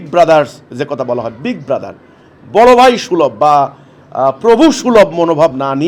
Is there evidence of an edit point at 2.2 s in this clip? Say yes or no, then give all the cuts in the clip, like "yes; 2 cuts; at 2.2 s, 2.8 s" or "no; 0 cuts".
no; 0 cuts